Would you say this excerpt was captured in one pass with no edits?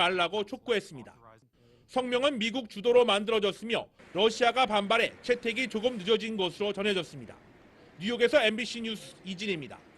no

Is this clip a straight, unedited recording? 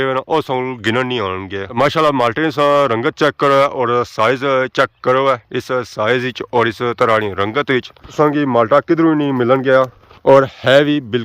no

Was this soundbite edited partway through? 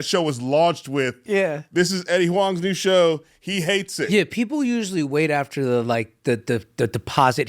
yes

